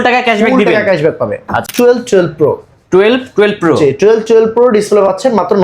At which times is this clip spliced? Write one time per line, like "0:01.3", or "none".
0:01.7